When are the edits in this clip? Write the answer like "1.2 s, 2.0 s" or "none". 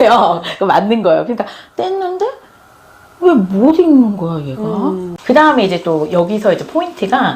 5.1 s